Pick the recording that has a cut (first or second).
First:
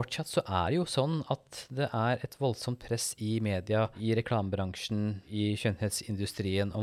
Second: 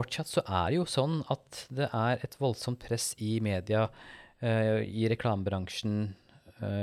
first